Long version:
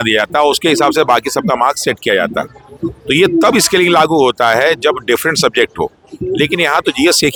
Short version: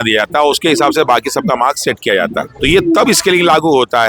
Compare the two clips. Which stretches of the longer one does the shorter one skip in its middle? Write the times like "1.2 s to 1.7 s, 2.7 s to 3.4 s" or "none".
2.5 s to 3.0 s